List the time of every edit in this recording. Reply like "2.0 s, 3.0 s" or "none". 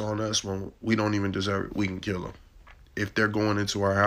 none